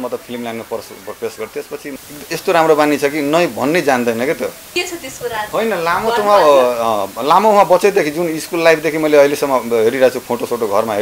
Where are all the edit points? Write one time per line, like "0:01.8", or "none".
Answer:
0:01.9
0:04.6